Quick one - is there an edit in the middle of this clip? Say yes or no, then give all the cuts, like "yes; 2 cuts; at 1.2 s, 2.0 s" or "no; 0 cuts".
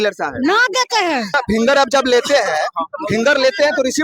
yes; 1 cut; at 1.4 s